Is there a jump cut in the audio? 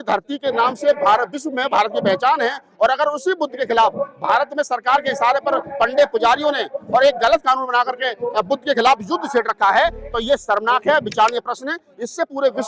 no; 0 cuts

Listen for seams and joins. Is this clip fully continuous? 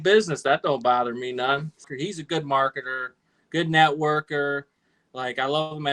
no; 1 cut; at 1.9 s

